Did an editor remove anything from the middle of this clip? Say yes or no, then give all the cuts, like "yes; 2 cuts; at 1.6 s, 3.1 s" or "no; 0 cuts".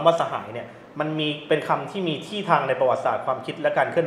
no; 0 cuts